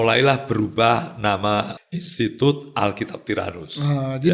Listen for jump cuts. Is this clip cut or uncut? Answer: cut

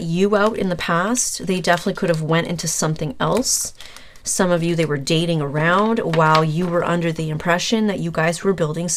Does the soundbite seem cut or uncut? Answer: uncut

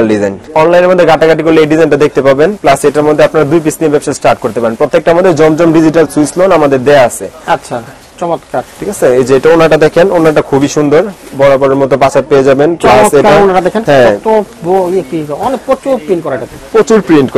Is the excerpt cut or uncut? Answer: uncut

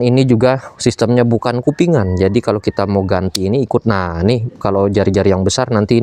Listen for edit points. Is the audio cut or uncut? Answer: uncut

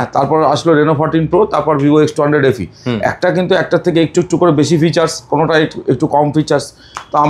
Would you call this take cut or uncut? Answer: uncut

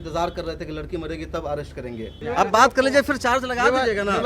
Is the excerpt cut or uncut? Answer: cut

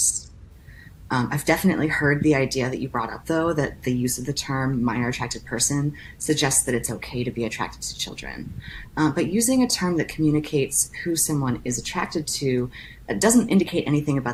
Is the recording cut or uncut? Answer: uncut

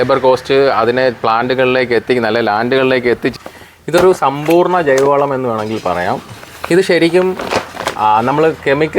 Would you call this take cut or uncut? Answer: cut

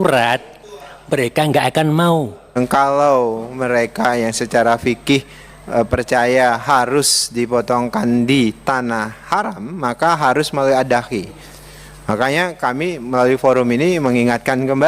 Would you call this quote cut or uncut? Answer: cut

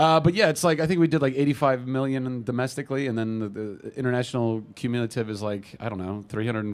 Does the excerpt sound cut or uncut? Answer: uncut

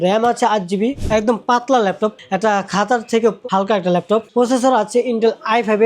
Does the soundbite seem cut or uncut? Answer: cut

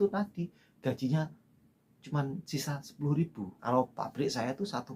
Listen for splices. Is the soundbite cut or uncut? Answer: cut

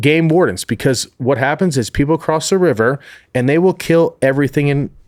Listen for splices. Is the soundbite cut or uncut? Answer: uncut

